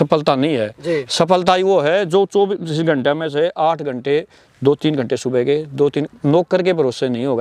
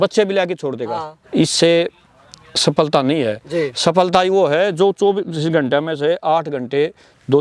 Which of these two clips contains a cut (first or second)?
second